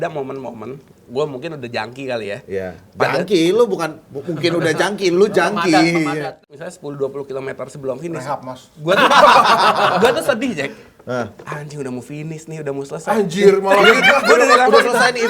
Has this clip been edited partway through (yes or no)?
yes